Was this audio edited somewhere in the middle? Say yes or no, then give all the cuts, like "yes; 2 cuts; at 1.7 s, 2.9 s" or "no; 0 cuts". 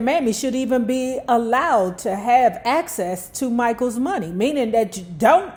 no; 0 cuts